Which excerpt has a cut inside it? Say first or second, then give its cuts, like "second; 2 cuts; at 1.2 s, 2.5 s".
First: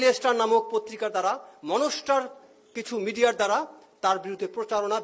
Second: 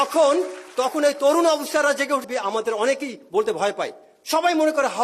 second; 1 cut; at 2.3 s